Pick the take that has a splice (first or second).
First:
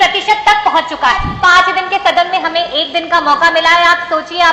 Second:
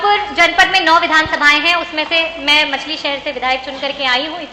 first